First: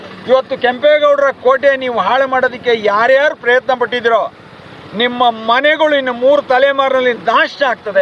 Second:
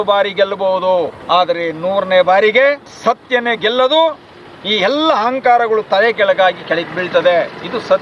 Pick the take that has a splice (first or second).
second